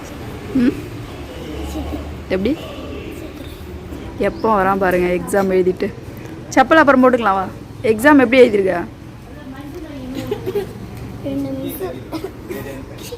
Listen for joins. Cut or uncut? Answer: cut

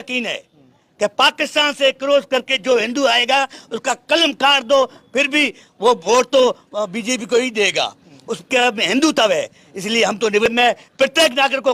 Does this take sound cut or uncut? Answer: cut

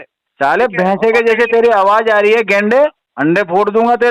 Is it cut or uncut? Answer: cut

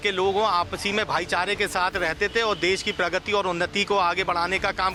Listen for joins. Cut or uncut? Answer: uncut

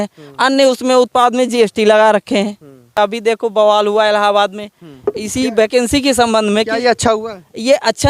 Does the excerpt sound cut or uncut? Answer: cut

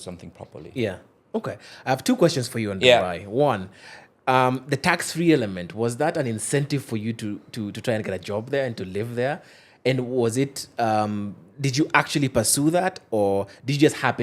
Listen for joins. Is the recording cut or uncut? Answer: uncut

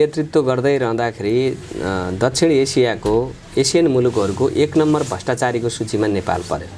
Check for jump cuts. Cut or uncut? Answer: uncut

